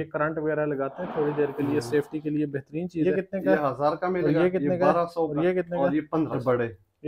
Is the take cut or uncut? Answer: uncut